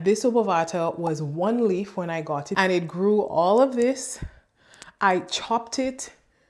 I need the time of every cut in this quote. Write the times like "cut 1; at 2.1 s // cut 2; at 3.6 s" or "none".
cut 1; at 2.4 s